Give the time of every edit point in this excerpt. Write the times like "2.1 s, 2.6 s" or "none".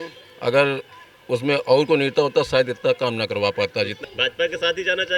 3.9 s